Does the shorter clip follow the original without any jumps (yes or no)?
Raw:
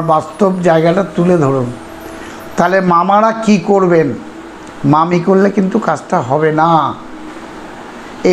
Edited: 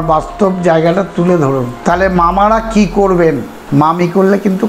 no